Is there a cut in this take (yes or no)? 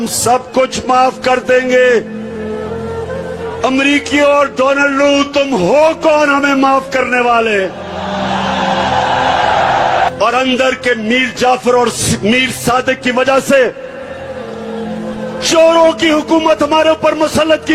yes